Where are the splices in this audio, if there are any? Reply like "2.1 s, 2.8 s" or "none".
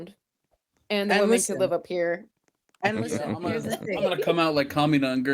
none

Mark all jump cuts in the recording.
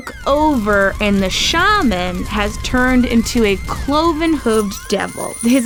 none

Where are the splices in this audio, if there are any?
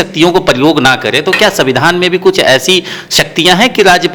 none

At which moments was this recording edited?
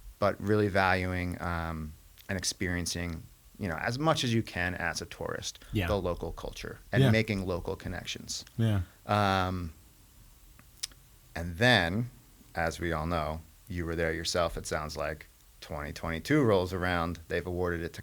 none

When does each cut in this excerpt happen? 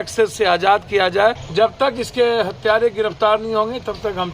1.4 s

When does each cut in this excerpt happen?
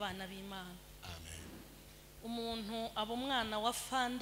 none

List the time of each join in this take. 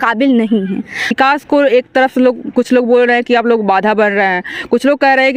1.1 s

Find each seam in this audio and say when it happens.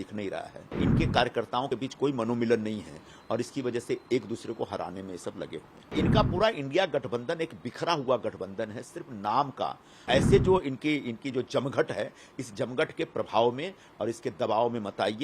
0.8 s, 5.9 s, 10.0 s

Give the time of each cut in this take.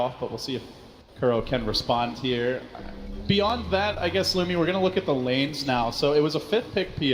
6.1 s

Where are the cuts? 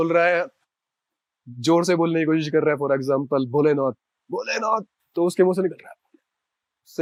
none

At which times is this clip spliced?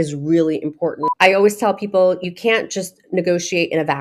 1.0 s, 2.2 s

